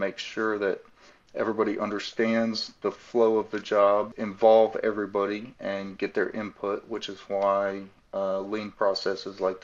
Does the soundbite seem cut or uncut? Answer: cut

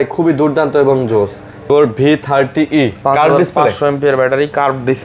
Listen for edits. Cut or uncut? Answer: cut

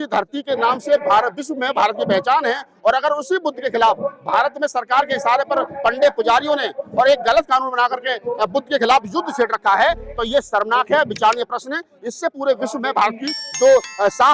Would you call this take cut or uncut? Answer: uncut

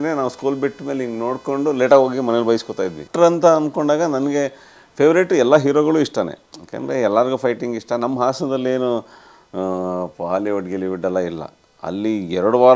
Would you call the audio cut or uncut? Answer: cut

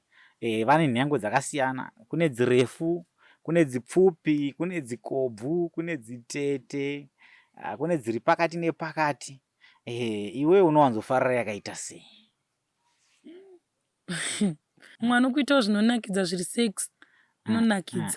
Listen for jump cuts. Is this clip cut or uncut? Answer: cut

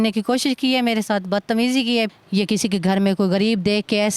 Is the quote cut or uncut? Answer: cut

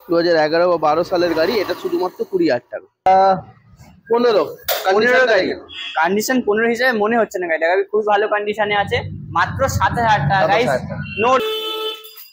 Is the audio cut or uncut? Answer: cut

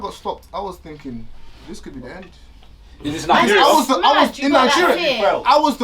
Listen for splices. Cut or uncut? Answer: uncut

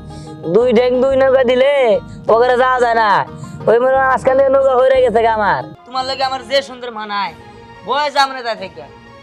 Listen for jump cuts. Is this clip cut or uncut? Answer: cut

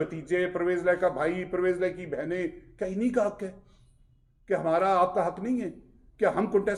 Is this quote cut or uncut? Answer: uncut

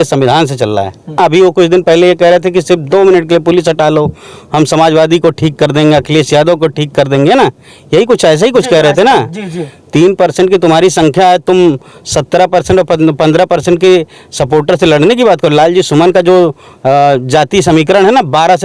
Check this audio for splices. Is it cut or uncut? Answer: cut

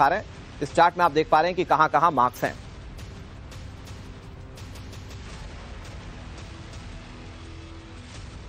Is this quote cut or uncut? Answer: uncut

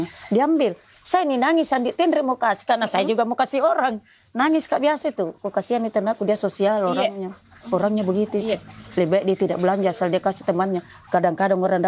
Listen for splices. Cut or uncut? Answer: uncut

